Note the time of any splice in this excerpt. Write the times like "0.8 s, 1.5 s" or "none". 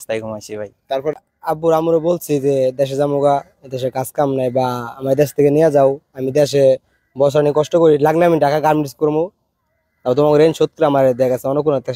1.1 s